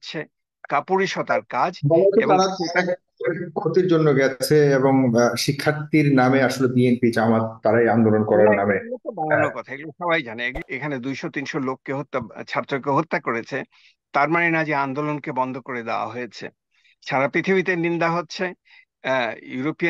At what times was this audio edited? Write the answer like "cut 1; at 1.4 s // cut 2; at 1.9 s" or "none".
cut 1; at 10.6 s